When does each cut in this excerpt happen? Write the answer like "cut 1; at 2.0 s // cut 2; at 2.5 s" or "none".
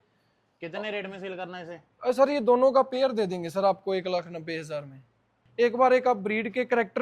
cut 1; at 5.4 s